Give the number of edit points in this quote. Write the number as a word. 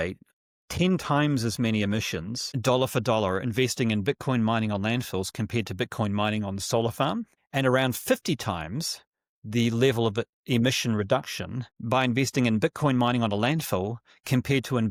zero